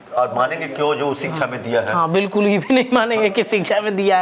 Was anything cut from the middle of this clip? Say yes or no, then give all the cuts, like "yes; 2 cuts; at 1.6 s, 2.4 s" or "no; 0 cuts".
no; 0 cuts